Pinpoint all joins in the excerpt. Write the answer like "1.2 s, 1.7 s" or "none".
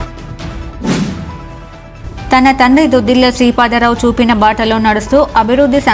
1.4 s